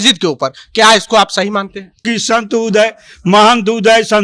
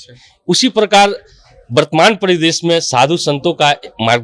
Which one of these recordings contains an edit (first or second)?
first